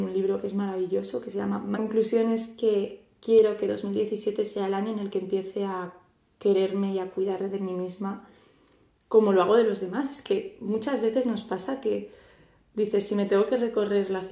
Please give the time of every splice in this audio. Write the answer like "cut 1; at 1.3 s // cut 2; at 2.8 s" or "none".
none